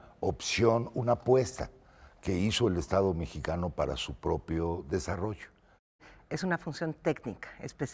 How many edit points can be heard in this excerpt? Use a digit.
1